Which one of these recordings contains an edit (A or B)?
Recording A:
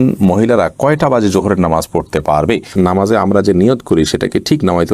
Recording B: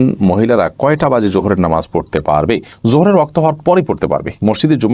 A